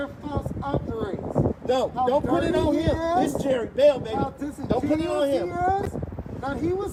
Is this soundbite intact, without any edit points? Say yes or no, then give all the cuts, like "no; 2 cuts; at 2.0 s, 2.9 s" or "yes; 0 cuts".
yes; 0 cuts